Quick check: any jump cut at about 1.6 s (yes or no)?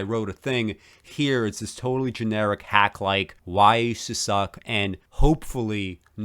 no